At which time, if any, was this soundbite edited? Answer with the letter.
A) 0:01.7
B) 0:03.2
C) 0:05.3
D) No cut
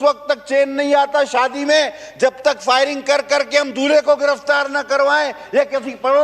D